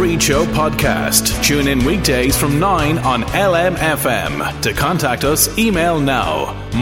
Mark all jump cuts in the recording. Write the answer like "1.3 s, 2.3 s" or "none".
none